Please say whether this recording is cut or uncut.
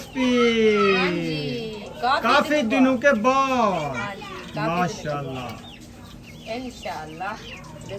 uncut